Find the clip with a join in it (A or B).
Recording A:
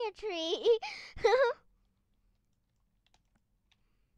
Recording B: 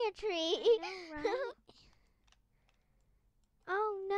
B